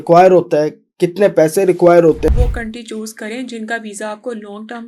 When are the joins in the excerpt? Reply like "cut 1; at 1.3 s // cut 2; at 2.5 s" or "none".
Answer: cut 1; at 2.3 s